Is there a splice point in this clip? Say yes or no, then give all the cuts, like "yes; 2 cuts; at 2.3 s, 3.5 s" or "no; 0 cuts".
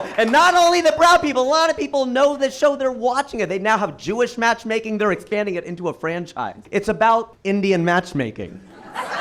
yes; 2 cuts; at 6.6 s, 7.3 s